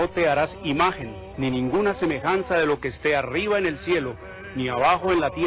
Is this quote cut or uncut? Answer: uncut